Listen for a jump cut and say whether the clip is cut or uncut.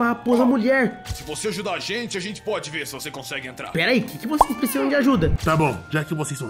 cut